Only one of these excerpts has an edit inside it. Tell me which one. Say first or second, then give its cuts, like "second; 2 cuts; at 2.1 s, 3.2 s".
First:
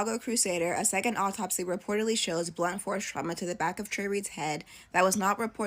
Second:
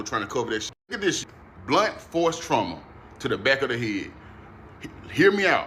second; 1 cut; at 1.0 s